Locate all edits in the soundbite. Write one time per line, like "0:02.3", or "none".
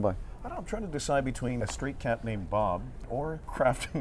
0:01.6
0:03.1